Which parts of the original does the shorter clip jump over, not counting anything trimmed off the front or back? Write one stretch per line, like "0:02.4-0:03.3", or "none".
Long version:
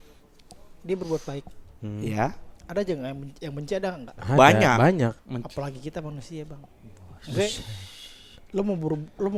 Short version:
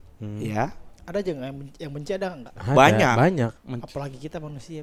none